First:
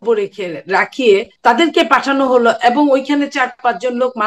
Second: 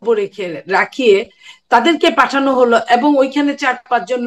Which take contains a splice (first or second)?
first